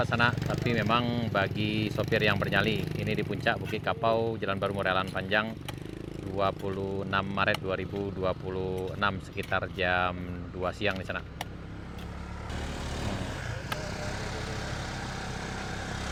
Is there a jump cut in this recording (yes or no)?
no